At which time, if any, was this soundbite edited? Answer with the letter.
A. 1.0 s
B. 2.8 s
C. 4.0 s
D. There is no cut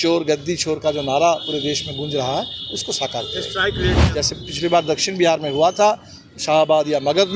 C